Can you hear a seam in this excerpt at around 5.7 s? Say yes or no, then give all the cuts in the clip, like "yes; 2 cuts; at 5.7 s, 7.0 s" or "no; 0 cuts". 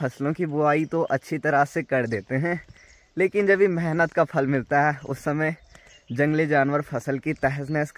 no; 0 cuts